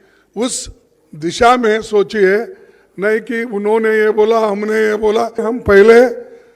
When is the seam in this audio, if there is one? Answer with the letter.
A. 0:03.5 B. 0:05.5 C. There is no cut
B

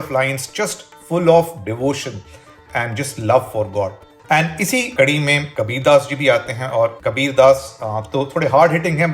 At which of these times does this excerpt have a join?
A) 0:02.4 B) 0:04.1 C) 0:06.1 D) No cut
B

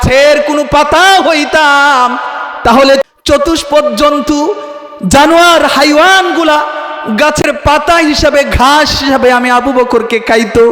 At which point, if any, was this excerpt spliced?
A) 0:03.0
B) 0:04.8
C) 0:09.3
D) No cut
A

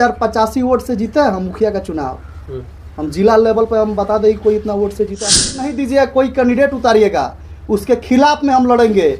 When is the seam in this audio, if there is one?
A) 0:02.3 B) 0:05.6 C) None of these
B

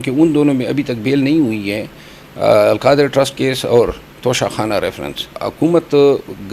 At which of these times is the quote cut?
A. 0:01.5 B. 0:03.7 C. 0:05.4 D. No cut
C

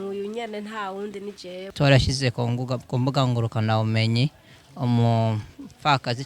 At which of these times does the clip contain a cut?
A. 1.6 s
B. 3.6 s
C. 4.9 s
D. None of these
A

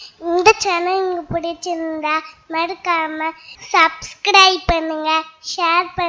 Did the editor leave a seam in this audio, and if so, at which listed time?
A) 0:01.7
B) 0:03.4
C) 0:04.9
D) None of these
D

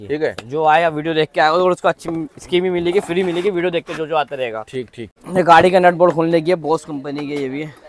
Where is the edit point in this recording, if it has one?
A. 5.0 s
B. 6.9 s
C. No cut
A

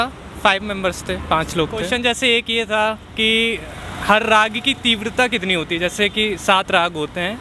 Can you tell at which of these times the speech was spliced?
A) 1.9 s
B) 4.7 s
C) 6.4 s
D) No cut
A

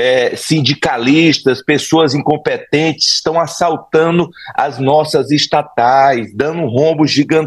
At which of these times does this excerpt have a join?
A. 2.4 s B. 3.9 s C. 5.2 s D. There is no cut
D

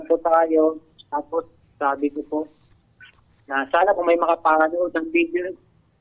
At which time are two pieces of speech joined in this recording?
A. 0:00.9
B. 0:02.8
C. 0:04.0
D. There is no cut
D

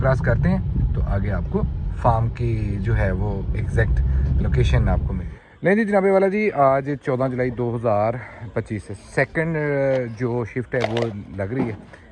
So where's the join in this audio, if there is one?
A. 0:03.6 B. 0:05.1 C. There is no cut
B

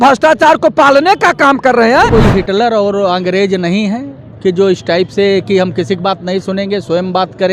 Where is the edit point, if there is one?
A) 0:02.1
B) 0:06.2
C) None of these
A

